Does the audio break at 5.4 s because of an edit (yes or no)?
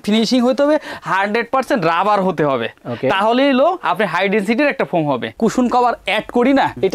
yes